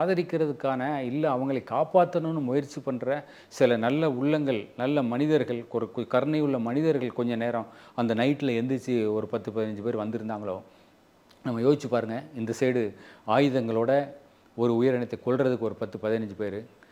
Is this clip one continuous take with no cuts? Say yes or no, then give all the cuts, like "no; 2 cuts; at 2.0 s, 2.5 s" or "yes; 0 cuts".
yes; 0 cuts